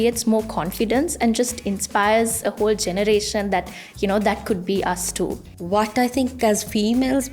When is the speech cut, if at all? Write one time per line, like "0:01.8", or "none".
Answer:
0:05.5